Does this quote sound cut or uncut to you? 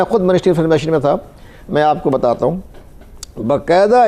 uncut